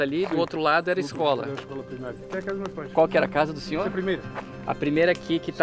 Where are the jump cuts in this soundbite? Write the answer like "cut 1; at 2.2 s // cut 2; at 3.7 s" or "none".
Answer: cut 1; at 2.2 s